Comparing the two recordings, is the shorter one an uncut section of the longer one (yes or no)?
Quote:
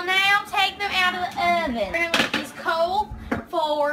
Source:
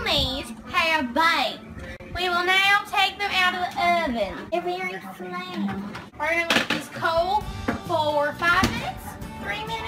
no